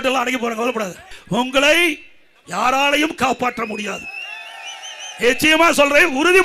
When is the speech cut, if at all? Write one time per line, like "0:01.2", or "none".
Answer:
0:01.2